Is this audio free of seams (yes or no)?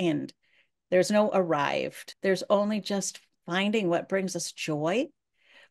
no